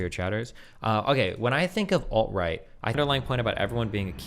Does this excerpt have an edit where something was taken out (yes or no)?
yes